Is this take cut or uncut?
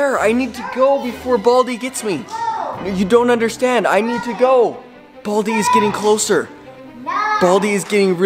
uncut